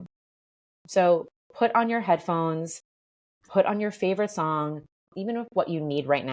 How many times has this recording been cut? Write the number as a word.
one